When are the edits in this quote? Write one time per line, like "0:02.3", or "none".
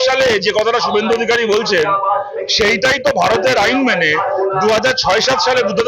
none